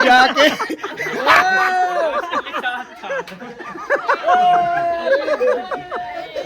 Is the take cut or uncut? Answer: cut